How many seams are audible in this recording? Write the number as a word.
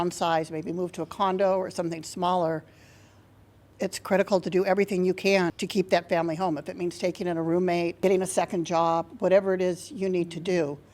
three